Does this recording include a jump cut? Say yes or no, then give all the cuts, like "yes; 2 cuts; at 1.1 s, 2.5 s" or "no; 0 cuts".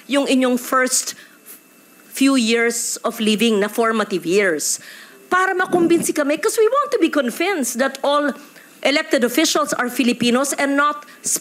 no; 0 cuts